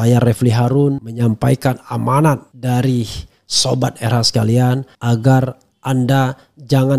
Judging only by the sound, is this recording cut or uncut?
cut